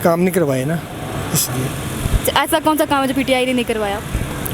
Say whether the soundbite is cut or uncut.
uncut